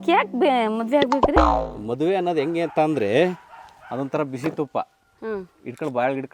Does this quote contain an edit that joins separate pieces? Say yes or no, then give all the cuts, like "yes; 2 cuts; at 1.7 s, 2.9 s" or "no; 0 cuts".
no; 0 cuts